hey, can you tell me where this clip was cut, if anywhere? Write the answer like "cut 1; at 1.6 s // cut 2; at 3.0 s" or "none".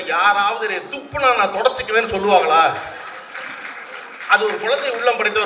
none